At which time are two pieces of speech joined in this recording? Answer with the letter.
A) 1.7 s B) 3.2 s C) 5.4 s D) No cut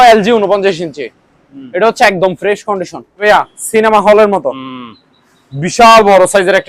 B